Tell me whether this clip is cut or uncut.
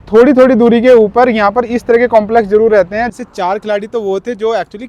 cut